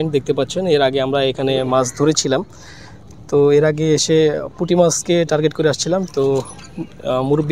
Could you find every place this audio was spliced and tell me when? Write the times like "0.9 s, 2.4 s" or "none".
none